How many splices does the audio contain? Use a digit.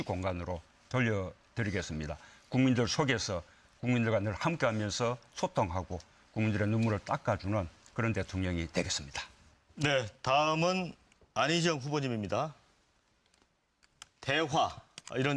1